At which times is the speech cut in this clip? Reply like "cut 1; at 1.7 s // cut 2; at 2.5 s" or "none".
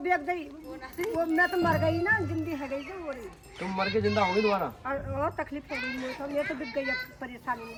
none